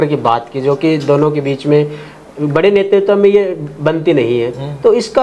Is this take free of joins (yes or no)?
yes